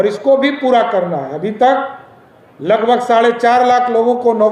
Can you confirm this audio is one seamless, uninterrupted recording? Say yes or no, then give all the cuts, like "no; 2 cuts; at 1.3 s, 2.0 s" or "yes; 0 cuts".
yes; 0 cuts